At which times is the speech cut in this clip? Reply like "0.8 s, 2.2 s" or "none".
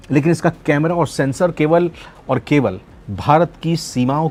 none